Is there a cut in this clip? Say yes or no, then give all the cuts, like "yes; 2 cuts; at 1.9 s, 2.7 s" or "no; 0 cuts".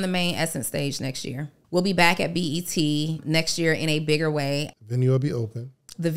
yes; 3 cuts; at 1.5 s, 3.2 s, 4.7 s